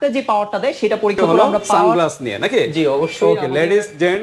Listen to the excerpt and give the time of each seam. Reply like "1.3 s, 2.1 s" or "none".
1.6 s